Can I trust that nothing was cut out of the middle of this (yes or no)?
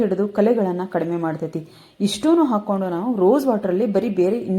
yes